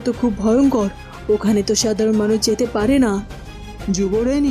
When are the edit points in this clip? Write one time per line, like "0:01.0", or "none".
none